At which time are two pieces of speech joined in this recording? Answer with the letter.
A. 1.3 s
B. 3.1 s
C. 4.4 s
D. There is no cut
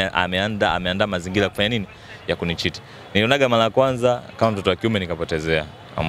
D